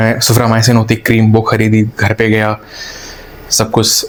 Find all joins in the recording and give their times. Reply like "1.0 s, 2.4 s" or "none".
none